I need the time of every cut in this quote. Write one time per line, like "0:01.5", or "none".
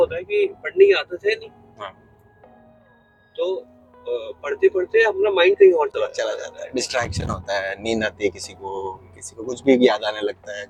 none